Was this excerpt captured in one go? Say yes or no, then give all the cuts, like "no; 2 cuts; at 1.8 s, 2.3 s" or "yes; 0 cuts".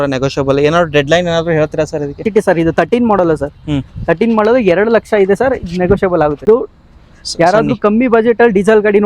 no; 2 cuts; at 2.3 s, 6.4 s